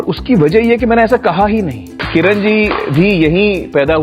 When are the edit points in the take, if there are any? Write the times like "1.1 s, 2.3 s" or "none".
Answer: 1.9 s